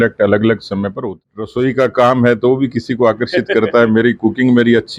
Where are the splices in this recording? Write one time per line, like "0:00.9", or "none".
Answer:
0:01.2